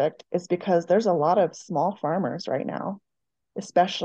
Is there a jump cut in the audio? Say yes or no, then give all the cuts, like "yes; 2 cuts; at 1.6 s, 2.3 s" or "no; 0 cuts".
no; 0 cuts